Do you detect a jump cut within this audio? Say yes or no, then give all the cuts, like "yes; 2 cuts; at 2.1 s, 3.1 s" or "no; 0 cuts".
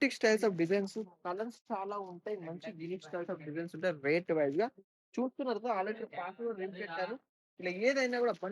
no; 0 cuts